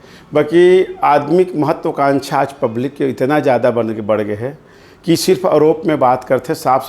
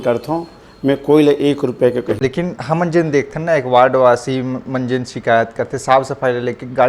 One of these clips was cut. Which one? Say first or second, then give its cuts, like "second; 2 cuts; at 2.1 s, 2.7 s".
second; 1 cut; at 2.1 s